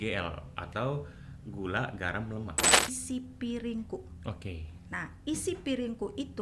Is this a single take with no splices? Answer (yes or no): no